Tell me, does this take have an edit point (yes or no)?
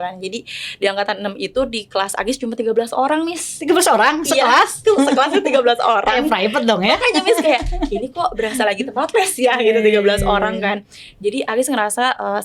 no